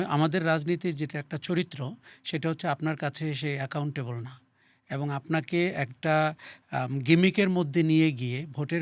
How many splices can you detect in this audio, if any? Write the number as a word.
zero